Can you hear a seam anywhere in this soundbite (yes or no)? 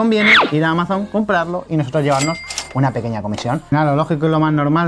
yes